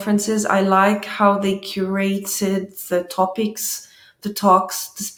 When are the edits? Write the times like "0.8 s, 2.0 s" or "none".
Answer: none